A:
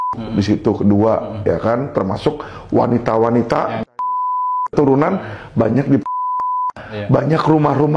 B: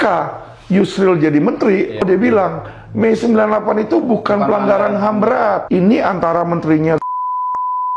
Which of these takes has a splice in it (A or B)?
B